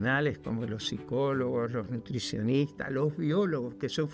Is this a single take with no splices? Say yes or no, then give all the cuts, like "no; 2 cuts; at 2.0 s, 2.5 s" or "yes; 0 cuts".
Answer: yes; 0 cuts